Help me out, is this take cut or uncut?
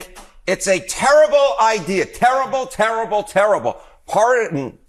uncut